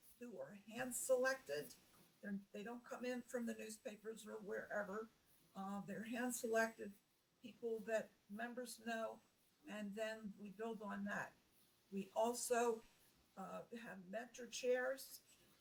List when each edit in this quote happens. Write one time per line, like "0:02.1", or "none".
none